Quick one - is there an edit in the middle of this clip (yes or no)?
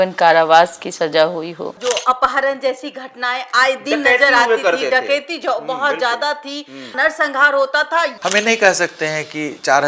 yes